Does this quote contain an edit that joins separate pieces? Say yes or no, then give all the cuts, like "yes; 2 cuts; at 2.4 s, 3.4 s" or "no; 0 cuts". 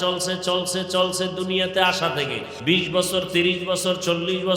yes; 1 cut; at 2.5 s